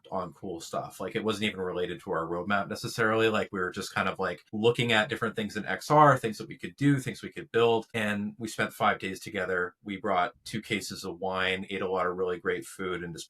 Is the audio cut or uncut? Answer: cut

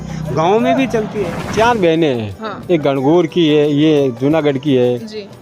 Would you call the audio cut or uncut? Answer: cut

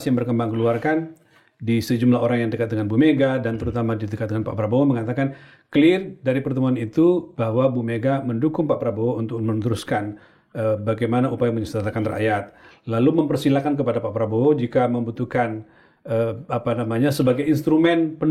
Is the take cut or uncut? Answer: uncut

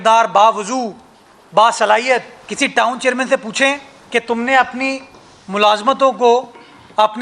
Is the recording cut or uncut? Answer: cut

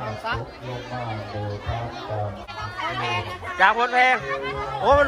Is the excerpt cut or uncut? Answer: cut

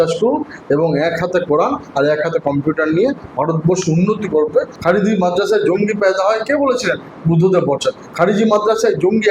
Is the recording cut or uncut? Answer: cut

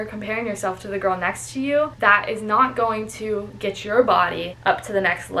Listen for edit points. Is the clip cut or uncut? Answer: cut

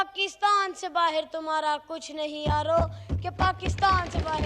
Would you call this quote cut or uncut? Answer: uncut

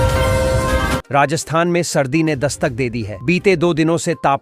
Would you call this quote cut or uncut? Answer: cut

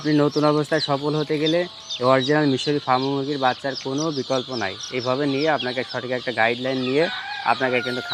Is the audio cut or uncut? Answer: uncut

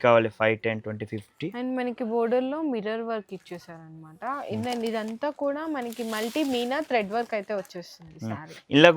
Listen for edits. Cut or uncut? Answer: uncut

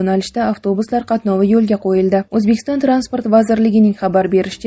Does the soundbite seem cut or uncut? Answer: uncut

